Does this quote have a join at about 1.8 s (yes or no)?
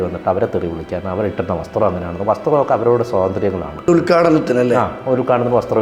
no